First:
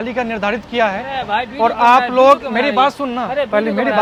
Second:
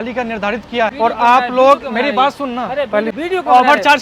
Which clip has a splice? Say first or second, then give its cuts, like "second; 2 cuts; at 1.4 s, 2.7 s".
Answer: second; 2 cuts; at 0.9 s, 3.1 s